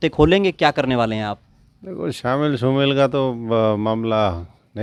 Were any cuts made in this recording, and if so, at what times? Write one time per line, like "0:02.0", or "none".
none